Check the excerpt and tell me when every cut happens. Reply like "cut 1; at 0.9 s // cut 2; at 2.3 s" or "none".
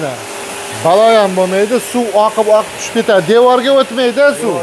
none